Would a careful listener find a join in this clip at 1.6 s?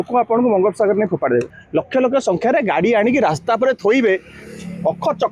yes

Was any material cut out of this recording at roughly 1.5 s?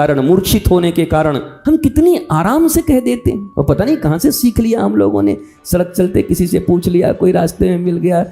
yes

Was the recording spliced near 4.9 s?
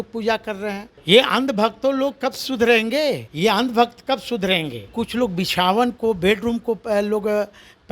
yes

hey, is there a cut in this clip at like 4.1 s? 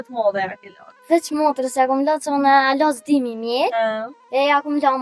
yes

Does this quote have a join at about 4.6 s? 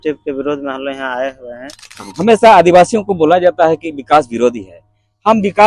no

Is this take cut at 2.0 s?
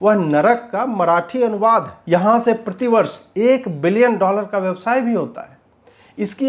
yes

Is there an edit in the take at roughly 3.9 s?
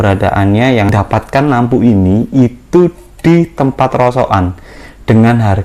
no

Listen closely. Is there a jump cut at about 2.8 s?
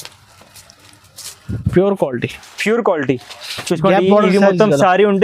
no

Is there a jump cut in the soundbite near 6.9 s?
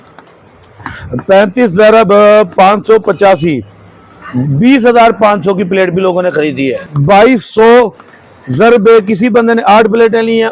yes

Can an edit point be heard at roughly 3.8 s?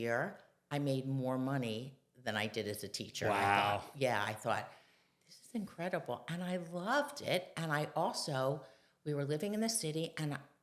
no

